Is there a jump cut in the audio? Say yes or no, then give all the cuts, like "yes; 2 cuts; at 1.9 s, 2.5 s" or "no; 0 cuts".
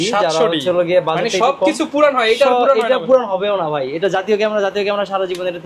no; 0 cuts